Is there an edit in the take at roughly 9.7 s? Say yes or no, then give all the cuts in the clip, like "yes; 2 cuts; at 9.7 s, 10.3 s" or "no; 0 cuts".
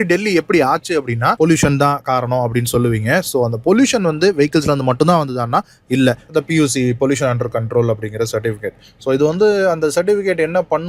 no; 2 cuts; at 1.3 s, 6.2 s